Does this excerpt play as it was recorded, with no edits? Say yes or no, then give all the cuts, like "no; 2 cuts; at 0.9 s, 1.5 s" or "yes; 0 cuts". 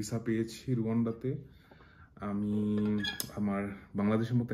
yes; 0 cuts